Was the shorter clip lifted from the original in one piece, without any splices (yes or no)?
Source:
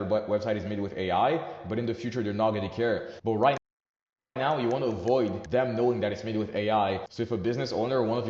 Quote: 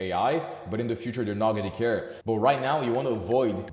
no